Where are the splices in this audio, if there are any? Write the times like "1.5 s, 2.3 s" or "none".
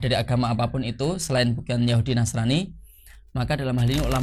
none